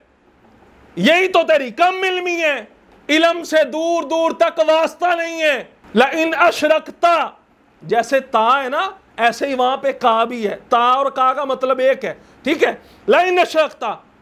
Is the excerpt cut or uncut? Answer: cut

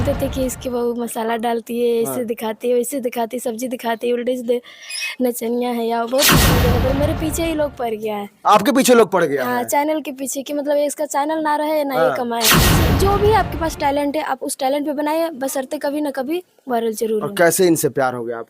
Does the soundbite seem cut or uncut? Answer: cut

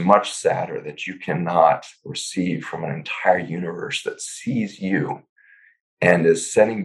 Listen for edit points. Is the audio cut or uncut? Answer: uncut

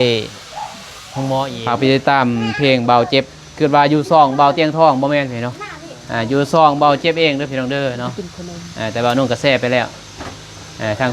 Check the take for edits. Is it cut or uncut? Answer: cut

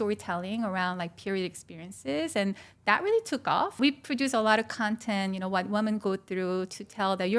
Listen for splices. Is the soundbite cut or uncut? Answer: cut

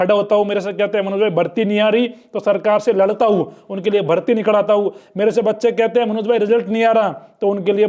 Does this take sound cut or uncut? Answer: uncut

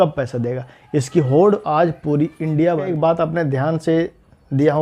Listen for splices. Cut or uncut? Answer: cut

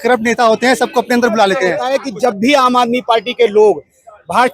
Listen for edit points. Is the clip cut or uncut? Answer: cut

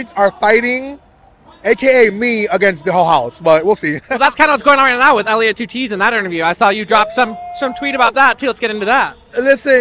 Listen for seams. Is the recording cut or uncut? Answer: uncut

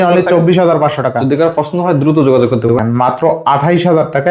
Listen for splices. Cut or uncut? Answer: cut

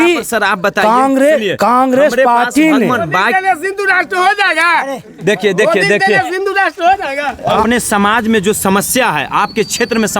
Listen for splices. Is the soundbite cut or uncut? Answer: cut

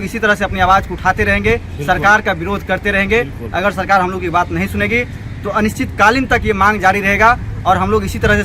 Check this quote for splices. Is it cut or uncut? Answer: uncut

